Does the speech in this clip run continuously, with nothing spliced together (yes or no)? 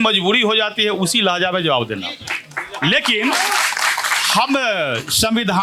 yes